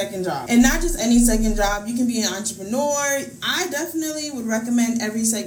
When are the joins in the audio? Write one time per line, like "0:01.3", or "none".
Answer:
none